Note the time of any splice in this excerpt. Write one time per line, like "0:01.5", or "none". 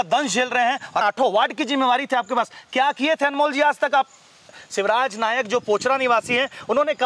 0:01.0
0:04.6